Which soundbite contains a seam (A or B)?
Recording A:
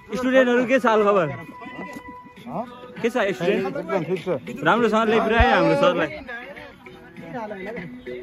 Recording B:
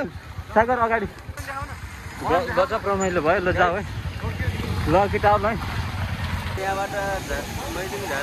B